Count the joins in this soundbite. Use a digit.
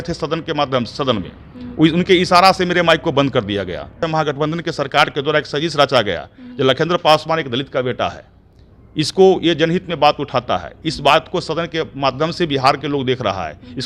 1